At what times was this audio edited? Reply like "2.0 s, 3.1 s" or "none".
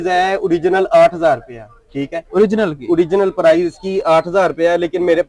none